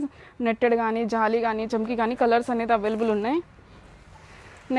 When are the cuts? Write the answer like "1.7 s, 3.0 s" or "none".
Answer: none